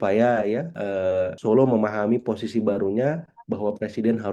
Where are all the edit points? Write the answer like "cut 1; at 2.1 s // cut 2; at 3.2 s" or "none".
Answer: cut 1; at 1.0 s